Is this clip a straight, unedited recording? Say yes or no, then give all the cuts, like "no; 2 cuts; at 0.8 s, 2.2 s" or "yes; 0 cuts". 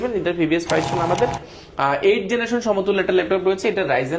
no; 1 cut; at 1.5 s